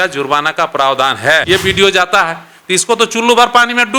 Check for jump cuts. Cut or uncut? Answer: cut